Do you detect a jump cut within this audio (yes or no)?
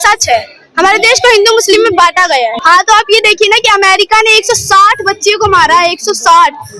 yes